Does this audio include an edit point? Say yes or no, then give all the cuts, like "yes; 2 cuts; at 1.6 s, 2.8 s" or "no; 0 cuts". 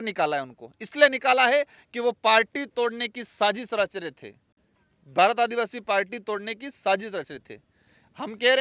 no; 0 cuts